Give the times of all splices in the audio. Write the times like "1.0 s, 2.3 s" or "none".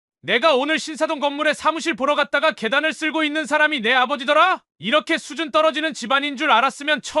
4.7 s